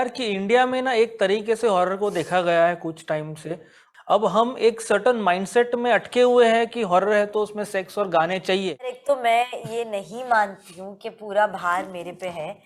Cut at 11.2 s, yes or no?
no